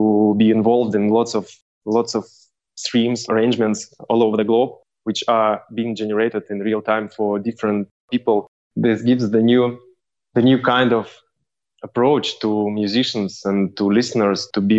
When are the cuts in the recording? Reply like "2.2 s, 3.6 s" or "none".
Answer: 3.2 s, 8.6 s